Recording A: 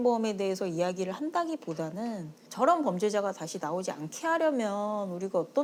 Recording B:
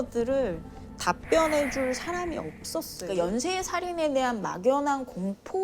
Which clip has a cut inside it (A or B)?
B